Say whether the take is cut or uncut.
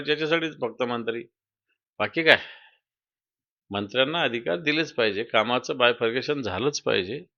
uncut